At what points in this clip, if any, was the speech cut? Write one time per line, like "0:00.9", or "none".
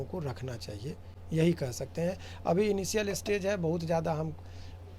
none